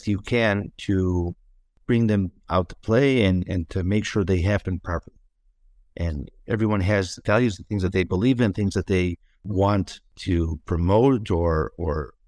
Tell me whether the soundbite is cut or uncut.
cut